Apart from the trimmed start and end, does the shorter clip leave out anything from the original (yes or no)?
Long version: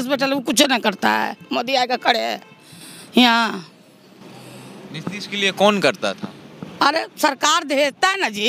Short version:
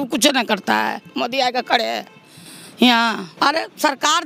yes